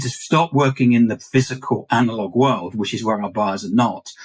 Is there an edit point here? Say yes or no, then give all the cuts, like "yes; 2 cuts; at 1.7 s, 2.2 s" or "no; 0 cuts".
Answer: yes; 1 cut; at 1.1 s